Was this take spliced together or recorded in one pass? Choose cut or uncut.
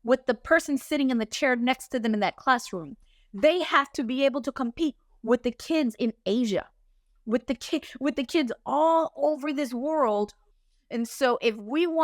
cut